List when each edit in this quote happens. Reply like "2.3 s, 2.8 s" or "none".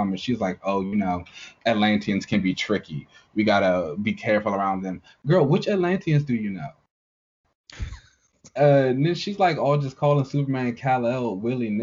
8.4 s